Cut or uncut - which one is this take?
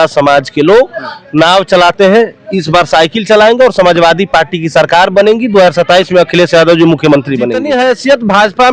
cut